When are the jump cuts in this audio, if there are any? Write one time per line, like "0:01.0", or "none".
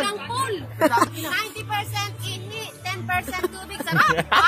0:01.1

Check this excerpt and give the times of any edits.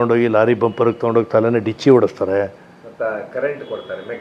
none

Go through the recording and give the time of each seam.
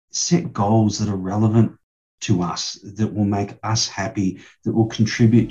none

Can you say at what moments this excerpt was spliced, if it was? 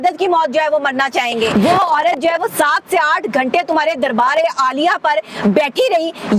0:01.5

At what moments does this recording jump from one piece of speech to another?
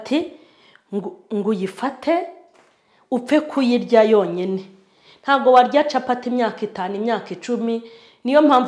none

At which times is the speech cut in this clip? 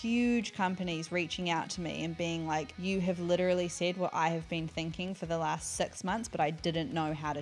none

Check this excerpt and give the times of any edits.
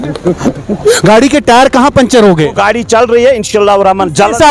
0:01.0

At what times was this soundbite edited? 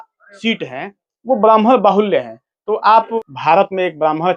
0:03.1

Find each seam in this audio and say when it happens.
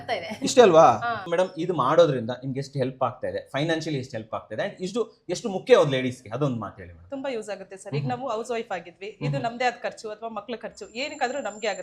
0:01.2

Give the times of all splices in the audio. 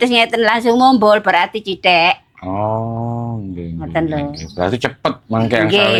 none

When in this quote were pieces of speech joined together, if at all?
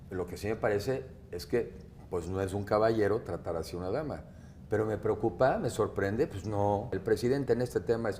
0:06.9

